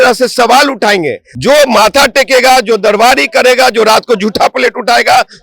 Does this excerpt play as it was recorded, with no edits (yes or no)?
no